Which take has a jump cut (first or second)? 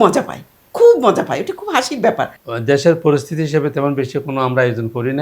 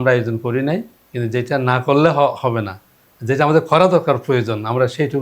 first